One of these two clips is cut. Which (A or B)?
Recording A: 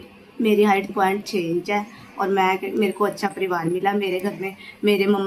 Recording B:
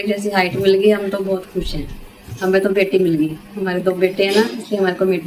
A